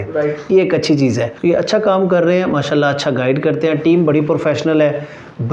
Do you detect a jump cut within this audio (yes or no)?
yes